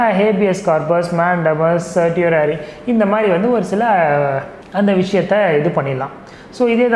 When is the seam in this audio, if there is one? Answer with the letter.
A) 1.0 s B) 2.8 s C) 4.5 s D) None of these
C